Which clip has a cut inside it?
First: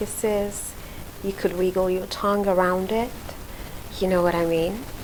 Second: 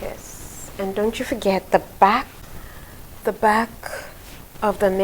second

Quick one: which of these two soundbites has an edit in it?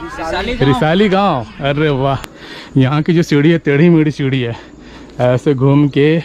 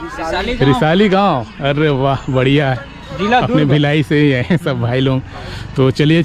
first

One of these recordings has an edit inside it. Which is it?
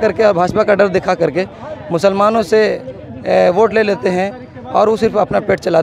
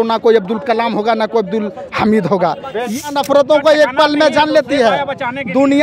second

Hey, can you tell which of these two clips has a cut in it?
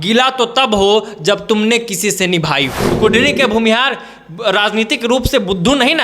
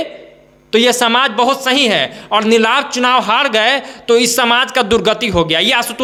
first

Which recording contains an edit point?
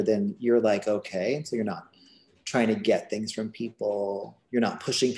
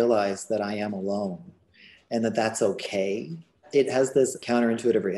second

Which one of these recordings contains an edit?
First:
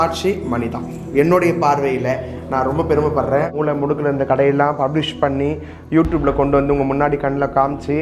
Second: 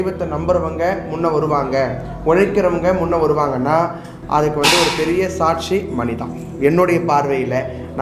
first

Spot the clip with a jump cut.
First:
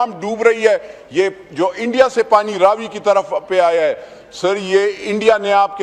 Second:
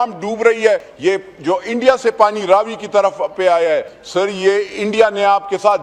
second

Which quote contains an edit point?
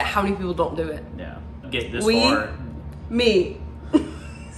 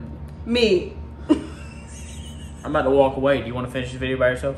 first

